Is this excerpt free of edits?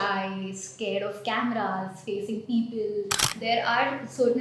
no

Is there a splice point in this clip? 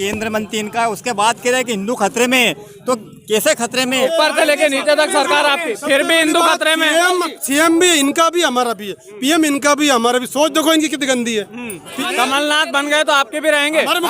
yes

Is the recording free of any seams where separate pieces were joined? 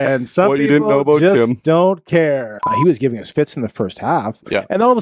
no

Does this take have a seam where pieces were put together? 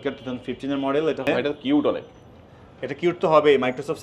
yes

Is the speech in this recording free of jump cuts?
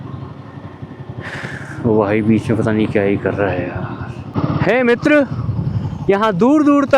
no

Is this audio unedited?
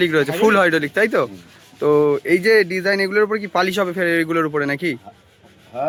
yes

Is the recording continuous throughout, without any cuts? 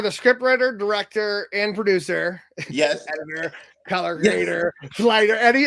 yes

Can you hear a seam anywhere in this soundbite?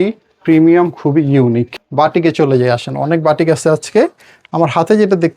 yes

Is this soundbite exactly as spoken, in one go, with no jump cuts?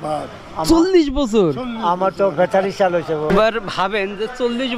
no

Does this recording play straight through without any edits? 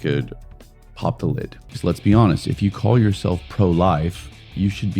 no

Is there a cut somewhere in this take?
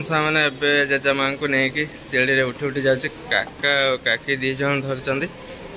no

